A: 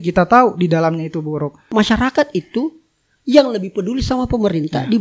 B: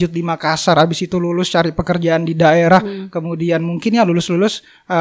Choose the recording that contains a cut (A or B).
A